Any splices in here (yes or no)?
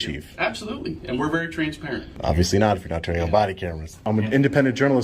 yes